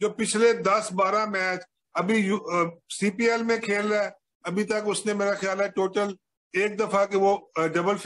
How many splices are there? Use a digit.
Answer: 0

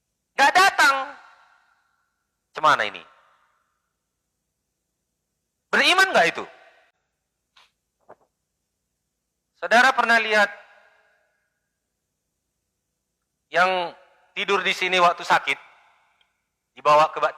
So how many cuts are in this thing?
1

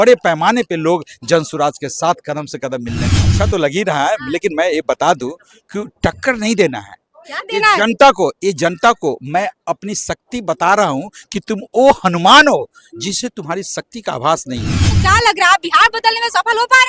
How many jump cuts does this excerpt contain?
2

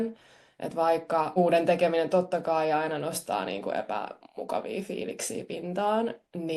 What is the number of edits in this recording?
1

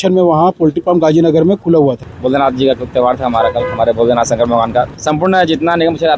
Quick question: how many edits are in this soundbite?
2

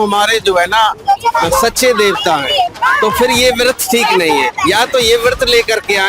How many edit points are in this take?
1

